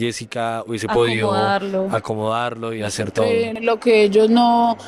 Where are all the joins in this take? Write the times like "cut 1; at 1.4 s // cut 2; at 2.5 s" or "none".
none